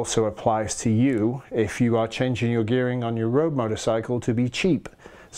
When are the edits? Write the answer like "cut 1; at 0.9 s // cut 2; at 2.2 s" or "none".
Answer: none

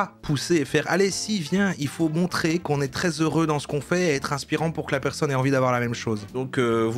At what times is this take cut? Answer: none

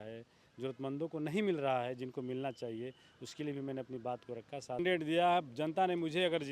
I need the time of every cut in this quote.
cut 1; at 4.8 s

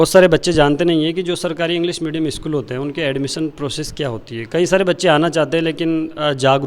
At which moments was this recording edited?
none

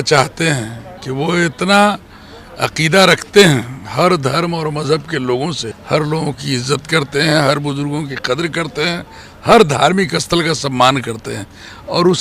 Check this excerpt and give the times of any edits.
cut 1; at 5.7 s

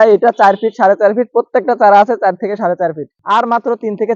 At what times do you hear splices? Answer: cut 1; at 3.1 s

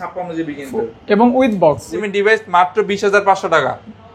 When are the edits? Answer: cut 1; at 2.0 s

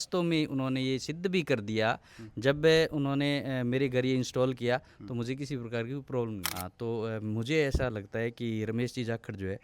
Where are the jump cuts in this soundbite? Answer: cut 1; at 6.5 s

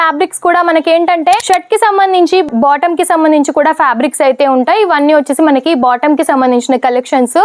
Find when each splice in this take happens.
cut 1; at 1.4 s

